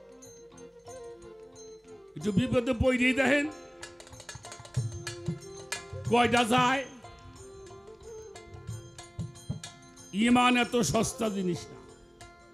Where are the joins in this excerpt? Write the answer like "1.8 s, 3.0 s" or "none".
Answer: none